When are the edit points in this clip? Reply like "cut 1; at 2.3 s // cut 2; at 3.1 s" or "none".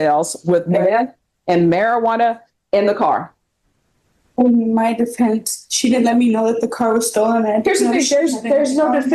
none